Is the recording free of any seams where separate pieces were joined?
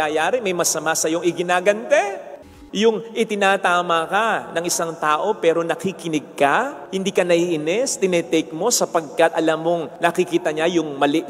no; 2 cuts; at 2.3 s, 9.9 s

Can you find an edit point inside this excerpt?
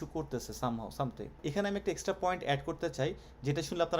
yes; 1 cut; at 1.4 s

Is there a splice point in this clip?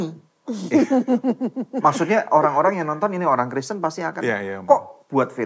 no; 0 cuts

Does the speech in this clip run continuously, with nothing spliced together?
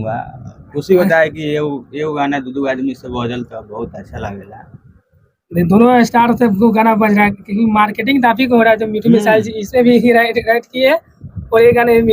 yes; 0 cuts

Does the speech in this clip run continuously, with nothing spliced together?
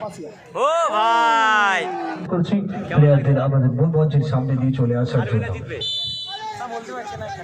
no; 1 cut; at 2.1 s

